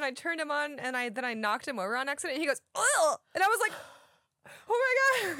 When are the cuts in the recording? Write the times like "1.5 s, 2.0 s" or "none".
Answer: none